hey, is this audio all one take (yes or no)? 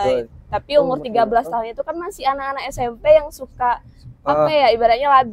yes